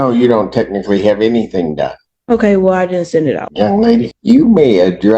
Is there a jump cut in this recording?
yes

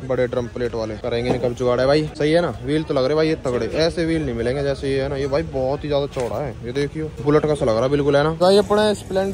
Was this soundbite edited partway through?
yes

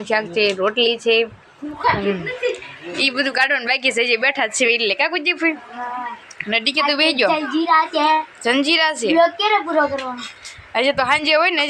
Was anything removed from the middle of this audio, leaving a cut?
no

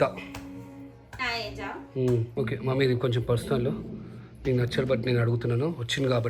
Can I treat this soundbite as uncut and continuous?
no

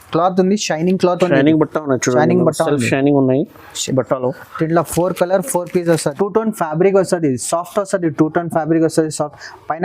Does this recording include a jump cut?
yes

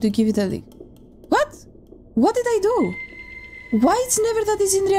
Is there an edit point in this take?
no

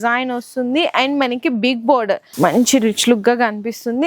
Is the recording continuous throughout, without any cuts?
no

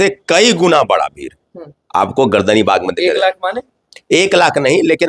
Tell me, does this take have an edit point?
no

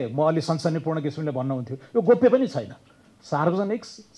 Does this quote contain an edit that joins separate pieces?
no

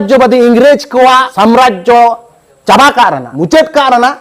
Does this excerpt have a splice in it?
yes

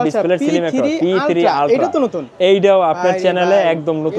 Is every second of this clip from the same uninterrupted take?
yes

